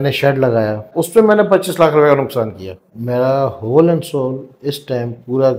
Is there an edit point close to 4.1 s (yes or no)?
no